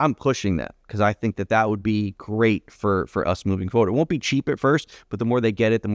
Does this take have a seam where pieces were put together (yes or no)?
no